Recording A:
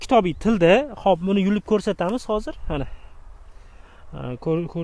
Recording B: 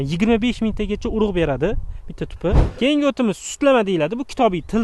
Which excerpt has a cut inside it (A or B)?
B